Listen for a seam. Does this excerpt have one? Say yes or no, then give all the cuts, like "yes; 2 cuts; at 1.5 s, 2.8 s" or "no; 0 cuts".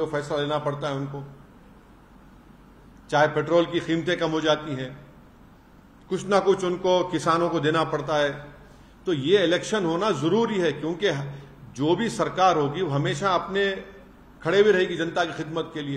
no; 0 cuts